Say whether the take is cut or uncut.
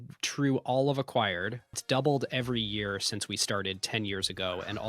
cut